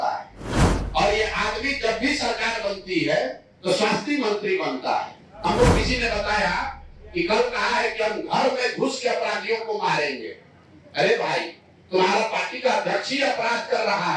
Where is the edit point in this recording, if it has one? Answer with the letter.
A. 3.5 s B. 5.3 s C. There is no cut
B